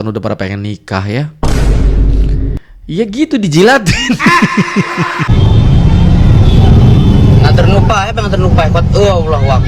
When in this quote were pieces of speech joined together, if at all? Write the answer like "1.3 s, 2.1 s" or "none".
5.3 s

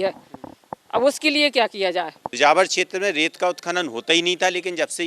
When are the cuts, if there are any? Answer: 2.3 s

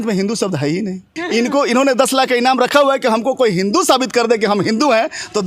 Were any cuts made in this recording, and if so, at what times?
1.1 s

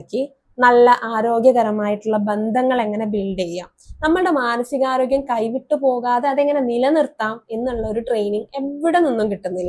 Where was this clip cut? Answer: none

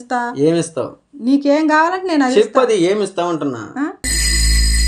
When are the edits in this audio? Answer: none

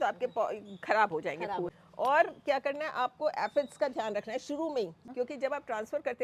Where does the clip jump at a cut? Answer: 1.7 s, 5.0 s

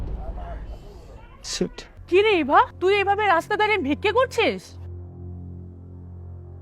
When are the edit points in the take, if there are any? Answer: 1.9 s, 2.7 s

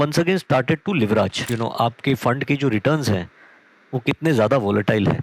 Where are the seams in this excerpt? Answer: 1.4 s

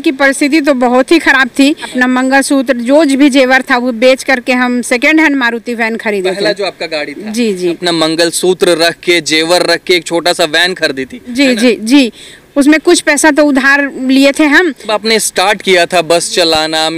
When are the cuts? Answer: 1.9 s, 7.8 s, 14.9 s

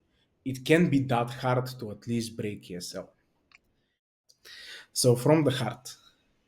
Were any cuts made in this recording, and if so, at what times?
4.2 s

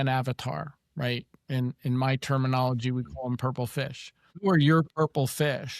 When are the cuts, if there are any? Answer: 4.4 s

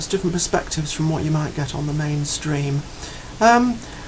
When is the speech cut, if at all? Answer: none

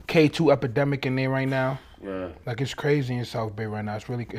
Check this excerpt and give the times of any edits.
none

